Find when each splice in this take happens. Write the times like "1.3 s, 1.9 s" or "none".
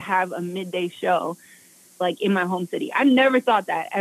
none